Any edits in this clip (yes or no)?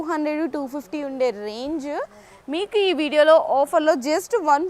no